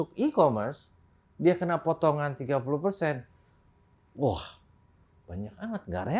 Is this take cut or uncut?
uncut